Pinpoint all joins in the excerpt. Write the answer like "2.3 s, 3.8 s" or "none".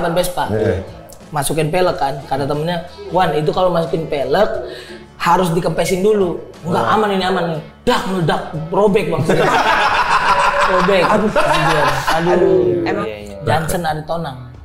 12.9 s